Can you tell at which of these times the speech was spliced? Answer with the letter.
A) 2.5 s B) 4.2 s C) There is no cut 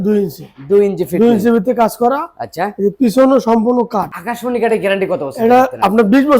B